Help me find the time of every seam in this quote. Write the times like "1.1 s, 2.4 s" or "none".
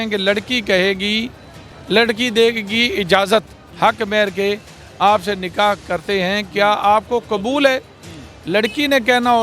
3.6 s